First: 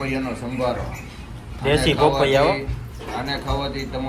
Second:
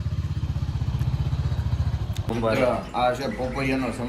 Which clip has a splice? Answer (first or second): second